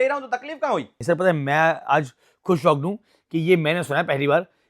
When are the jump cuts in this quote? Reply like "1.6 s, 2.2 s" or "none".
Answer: 0.9 s